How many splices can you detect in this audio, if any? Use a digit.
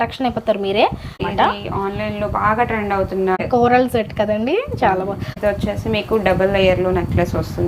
3